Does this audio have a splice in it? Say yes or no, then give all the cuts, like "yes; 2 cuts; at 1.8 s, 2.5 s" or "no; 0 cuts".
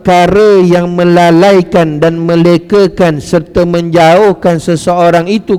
no; 0 cuts